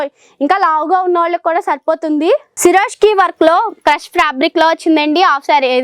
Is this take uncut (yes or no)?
no